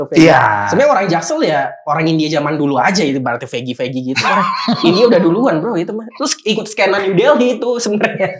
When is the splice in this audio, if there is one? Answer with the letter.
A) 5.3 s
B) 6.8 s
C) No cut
C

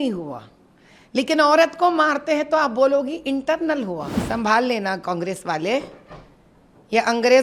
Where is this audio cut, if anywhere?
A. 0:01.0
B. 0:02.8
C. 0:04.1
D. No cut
C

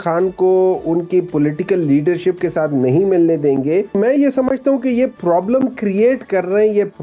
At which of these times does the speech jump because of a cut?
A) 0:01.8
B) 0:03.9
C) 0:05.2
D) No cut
B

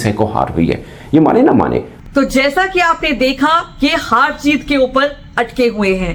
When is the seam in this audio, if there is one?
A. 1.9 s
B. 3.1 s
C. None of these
C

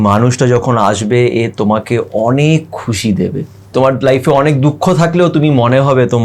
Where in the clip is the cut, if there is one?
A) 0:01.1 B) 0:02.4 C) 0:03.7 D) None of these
C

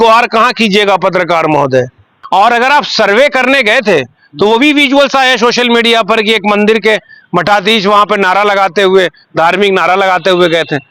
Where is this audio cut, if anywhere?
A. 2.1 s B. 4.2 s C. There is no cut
A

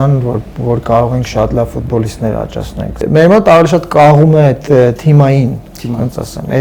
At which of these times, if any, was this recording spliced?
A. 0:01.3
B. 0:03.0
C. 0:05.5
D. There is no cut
B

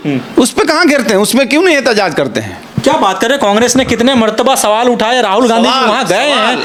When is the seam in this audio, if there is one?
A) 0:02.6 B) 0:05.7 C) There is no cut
C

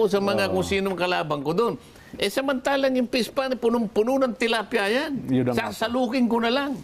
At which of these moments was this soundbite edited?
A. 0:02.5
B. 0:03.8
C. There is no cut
C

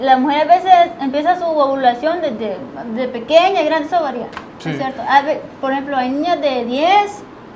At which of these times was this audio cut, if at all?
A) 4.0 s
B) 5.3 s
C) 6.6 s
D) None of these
D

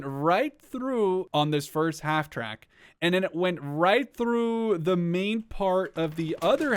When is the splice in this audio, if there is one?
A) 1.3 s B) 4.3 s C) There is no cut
A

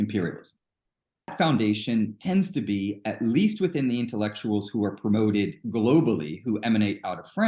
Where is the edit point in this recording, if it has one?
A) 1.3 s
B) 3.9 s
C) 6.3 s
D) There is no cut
A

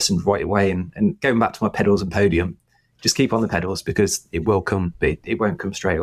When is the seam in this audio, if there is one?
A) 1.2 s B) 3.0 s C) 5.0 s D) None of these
D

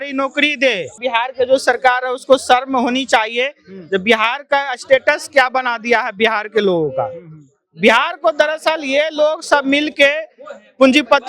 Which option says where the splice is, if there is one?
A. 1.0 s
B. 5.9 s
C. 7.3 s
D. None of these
A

